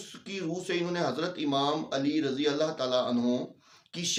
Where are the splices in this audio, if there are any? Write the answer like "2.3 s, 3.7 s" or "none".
none